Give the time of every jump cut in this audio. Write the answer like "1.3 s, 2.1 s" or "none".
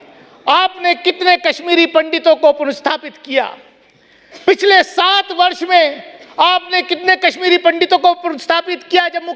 none